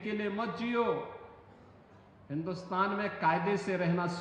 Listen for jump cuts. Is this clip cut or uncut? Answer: uncut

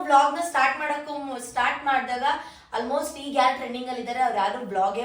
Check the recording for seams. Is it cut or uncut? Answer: uncut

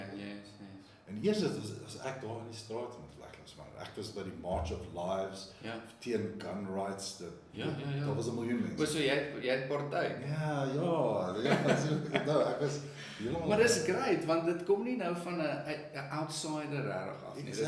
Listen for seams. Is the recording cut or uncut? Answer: uncut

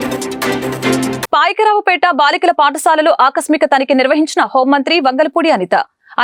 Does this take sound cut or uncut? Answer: uncut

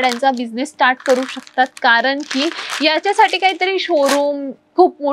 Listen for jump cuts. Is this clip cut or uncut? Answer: uncut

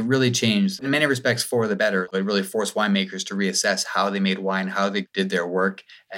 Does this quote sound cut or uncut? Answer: cut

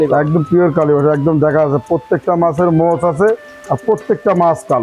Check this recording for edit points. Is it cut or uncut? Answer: uncut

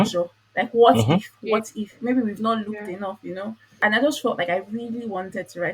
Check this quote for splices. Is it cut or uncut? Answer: uncut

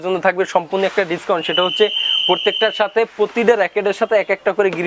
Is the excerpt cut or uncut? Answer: uncut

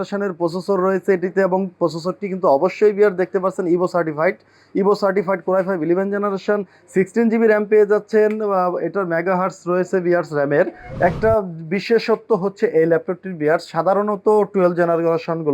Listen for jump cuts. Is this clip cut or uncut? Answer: cut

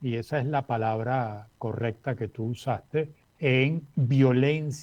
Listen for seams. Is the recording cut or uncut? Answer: cut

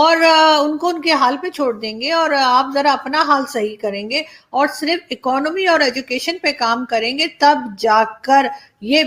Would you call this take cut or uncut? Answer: uncut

